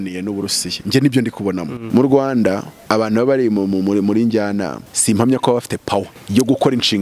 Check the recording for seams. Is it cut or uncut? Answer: cut